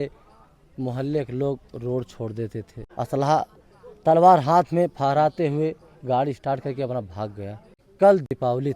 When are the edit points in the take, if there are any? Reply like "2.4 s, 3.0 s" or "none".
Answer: 2.8 s, 7.9 s